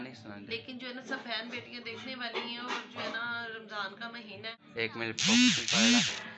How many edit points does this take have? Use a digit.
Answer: 1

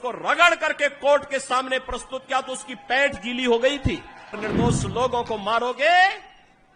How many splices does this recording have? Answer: 1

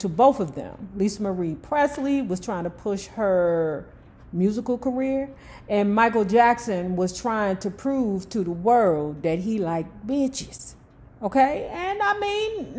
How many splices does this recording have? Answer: 0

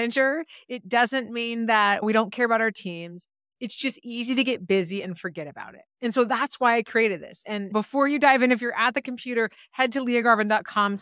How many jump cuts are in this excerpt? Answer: 2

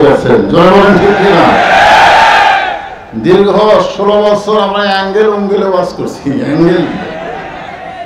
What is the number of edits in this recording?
0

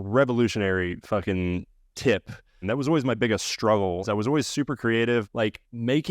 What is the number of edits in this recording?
1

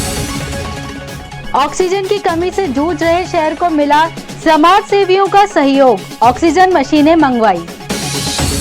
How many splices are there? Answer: 1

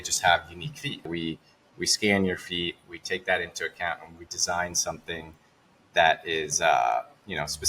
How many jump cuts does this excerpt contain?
1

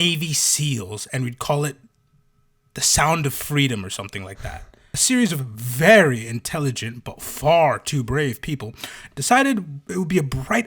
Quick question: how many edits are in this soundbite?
1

